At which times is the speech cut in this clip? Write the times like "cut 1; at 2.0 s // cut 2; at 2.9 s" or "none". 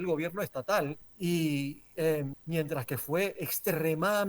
cut 1; at 1.1 s // cut 2; at 2.4 s